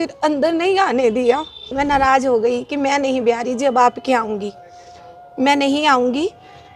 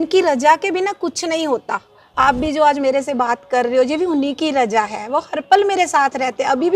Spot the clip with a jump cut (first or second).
first